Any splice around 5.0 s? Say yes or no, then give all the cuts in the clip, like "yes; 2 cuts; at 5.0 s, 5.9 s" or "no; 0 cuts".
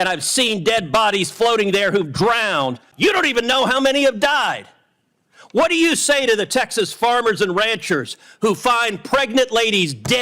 no; 1 cut; at 2.9 s